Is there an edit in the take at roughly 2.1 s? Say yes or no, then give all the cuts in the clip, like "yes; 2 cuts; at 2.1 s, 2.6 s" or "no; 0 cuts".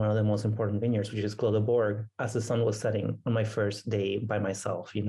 no; 0 cuts